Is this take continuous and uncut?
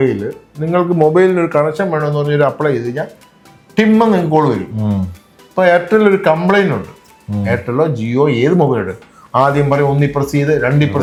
yes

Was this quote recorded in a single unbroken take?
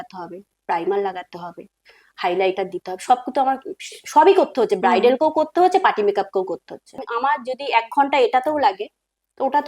no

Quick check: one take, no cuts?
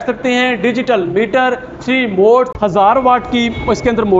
no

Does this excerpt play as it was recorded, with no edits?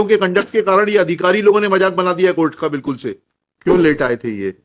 no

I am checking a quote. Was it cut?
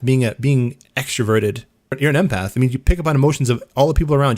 yes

